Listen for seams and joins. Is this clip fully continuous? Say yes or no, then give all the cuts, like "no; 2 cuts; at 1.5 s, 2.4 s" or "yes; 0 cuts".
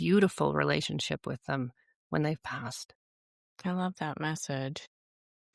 yes; 0 cuts